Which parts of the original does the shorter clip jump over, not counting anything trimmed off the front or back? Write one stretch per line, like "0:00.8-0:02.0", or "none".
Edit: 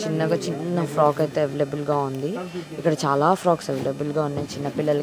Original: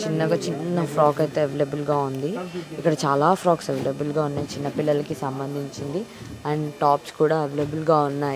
none